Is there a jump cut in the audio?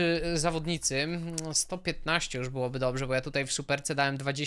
no; 0 cuts

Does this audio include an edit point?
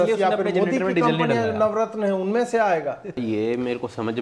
yes; 1 cut; at 3.2 s

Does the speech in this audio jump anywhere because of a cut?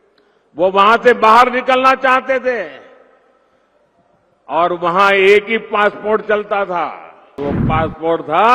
yes; 1 cut; at 7.4 s

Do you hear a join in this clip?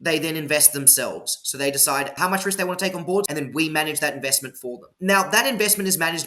yes; 3 cuts; at 2.1 s, 3.3 s, 4.9 s

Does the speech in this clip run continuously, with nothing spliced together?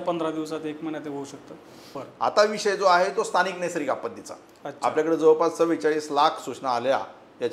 no; 1 cut; at 1.9 s

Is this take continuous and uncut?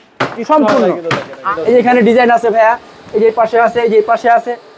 no; 1 cut; at 1.4 s

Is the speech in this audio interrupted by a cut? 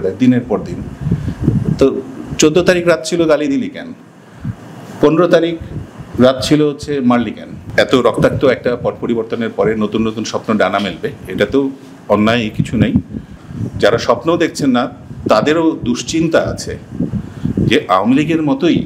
yes; 2 cuts; at 7.6 s, 13.4 s

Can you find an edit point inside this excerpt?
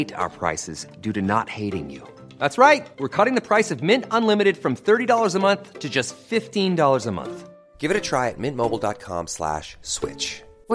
no; 0 cuts

